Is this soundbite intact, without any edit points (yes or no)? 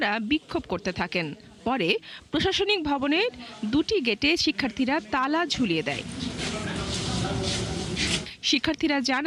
yes